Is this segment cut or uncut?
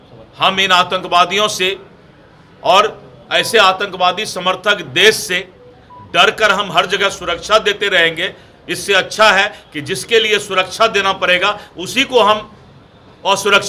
uncut